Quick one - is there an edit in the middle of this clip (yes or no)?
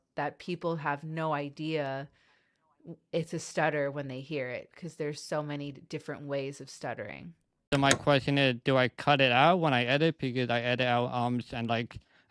yes